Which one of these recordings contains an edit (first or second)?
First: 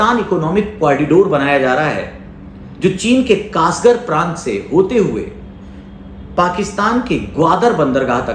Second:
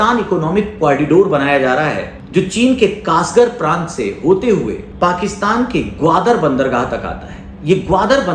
second